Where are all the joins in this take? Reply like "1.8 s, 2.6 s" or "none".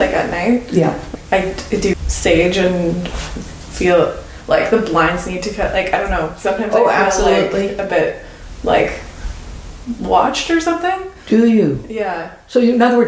none